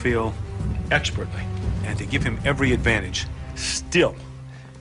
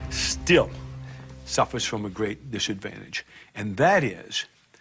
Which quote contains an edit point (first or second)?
second